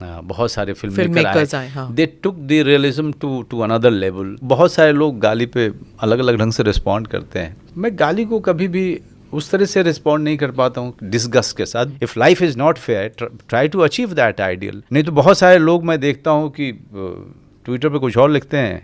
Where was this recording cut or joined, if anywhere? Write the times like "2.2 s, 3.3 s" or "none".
4.4 s, 7.6 s, 11.9 s, 14.7 s